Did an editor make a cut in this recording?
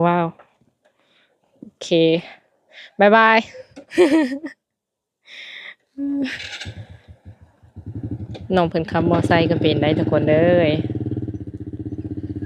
no; 0 cuts

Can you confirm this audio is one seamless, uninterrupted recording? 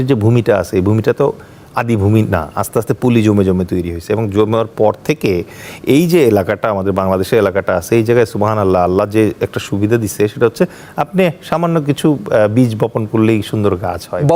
yes; 0 cuts

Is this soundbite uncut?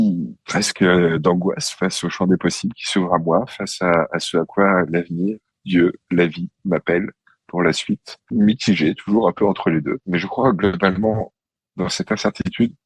no; 2 cuts; at 8.2 s, 10.0 s

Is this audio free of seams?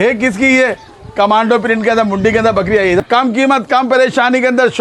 no; 1 cut; at 3.0 s

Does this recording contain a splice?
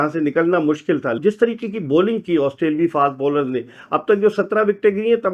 yes; 1 cut; at 1.2 s

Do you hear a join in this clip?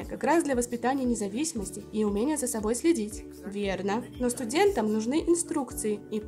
no; 0 cuts

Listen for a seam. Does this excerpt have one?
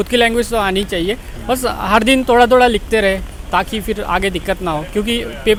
no; 0 cuts

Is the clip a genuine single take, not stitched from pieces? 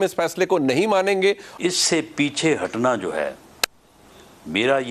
no; 1 cut; at 1.5 s

